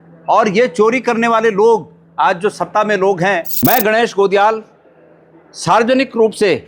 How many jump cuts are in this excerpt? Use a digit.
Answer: 1